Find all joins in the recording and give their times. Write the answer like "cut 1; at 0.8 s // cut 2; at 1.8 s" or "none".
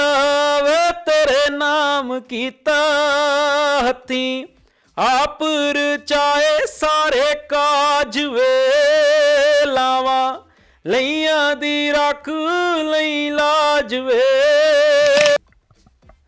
cut 1; at 15.4 s